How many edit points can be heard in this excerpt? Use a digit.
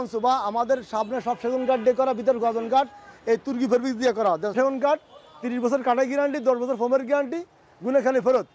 1